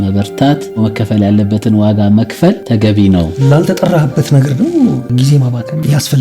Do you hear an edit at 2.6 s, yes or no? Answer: yes